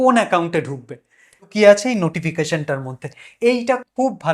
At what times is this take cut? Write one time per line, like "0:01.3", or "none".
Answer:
0:01.5